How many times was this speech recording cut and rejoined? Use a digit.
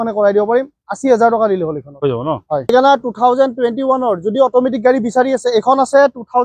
1